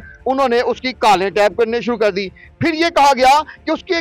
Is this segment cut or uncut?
uncut